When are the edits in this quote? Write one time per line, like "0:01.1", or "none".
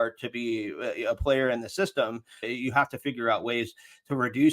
0:02.4